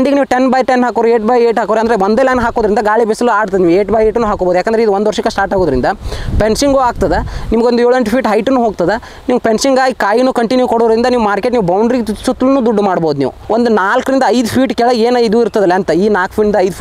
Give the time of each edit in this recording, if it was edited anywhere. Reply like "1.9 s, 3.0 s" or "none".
13.4 s